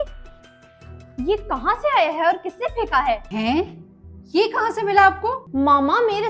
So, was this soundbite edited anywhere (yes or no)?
yes